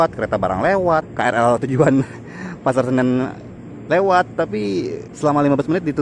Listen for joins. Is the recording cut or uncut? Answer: cut